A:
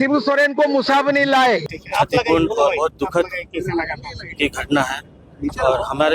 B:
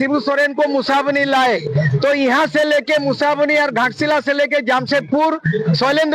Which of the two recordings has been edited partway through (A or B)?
A